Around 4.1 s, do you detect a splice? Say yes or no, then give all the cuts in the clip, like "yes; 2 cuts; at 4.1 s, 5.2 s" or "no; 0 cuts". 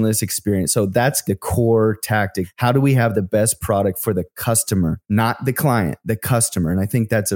no; 2 cuts; at 1.2 s, 2.4 s